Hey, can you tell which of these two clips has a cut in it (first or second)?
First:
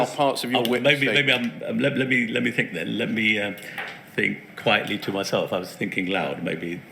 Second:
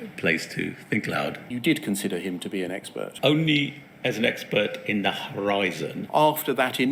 second